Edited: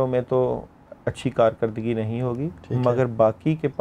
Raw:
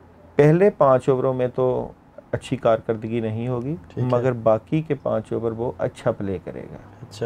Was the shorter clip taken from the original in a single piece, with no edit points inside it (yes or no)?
yes